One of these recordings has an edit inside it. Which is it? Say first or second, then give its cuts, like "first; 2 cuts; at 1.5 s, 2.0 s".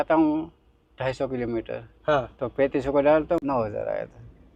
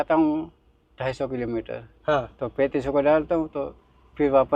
first; 1 cut; at 3.4 s